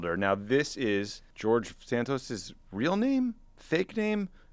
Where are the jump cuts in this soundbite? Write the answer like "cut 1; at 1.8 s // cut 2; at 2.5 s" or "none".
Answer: cut 1; at 1.2 s

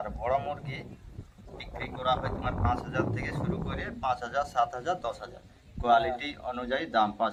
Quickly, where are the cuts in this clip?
none

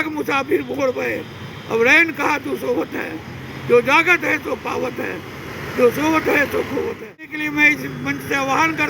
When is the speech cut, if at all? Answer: cut 1; at 7.4 s

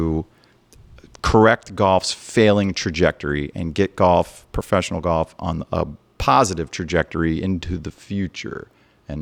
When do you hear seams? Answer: none

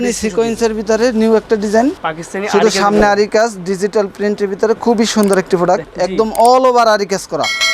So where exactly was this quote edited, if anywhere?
cut 1; at 2.1 s // cut 2; at 5.9 s

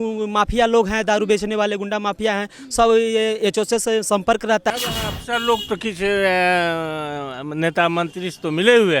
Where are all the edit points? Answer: cut 1; at 4.7 s

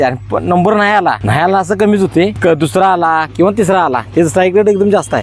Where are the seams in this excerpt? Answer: cut 1; at 1.2 s // cut 2; at 2.4 s

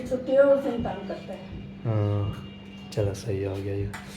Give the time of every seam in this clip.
none

